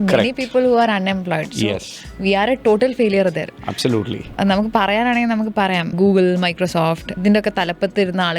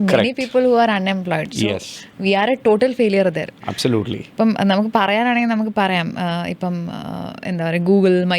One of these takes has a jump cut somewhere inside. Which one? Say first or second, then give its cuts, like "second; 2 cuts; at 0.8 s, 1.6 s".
first; 3 cuts; at 4.4 s, 5.9 s, 7.1 s